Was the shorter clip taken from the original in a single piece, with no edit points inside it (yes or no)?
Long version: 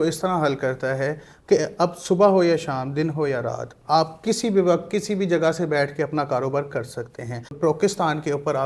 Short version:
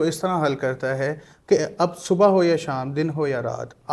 yes